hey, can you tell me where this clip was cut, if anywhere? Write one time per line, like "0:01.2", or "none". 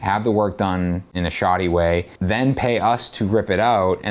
0:01.1
0:02.1